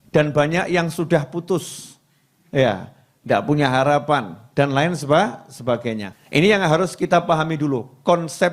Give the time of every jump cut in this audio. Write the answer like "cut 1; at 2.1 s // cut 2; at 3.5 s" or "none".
cut 1; at 6.1 s